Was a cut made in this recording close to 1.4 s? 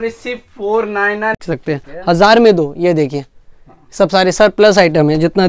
yes; 1 cut; at 1.4 s

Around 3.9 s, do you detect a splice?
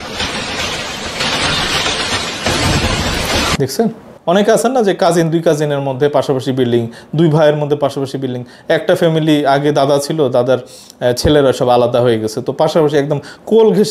no; 0 cuts

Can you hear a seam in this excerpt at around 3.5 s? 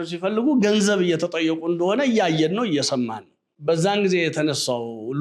yes; 1 cut; at 3.5 s

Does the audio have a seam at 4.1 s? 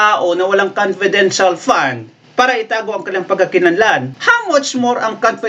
yes; 1 cut; at 4.1 s

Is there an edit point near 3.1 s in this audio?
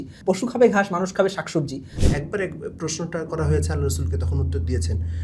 no; 1 cut; at 1.8 s

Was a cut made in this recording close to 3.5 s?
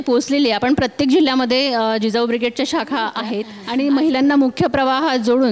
yes; 1 cut; at 3.5 s

